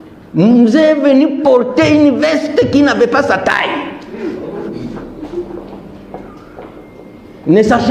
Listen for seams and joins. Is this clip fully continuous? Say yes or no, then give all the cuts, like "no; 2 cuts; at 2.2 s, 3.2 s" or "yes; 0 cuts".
yes; 0 cuts